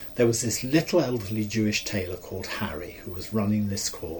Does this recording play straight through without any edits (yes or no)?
yes